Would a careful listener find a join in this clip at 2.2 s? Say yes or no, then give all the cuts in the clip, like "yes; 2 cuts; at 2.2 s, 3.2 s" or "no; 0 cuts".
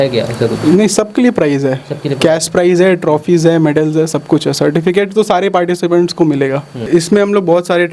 no; 1 cut; at 6.9 s